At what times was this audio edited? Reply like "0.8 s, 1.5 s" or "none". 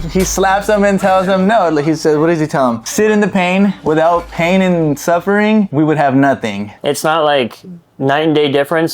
6.7 s